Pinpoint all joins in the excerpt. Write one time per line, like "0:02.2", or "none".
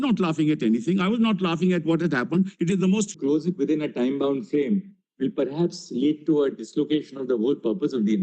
0:03.1